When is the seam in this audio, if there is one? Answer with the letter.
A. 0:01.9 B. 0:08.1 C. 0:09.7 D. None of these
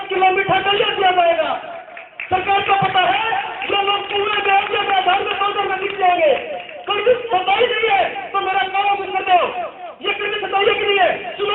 D